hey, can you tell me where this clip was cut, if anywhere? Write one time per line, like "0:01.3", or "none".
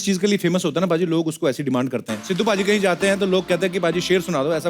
0:02.2